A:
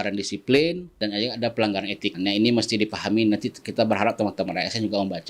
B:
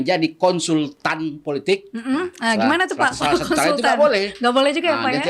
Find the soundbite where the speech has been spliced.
A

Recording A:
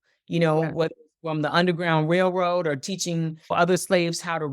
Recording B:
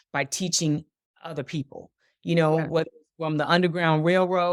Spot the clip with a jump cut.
A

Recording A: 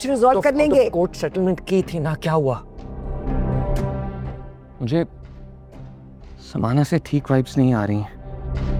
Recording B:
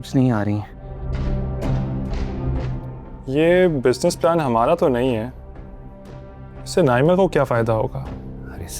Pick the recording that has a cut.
B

